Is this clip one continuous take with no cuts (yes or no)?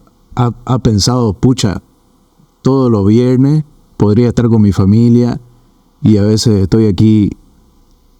yes